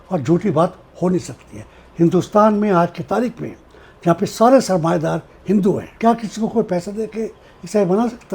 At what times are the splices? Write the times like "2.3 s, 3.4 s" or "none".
5.9 s